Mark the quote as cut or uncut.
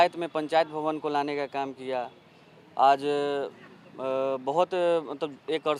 uncut